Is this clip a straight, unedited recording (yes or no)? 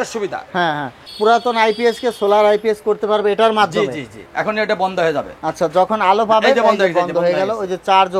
no